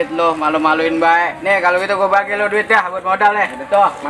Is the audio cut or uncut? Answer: uncut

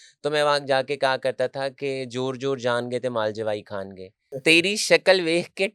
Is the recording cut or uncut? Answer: cut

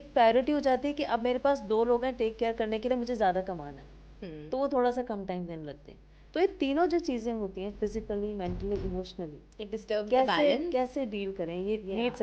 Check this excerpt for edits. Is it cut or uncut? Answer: uncut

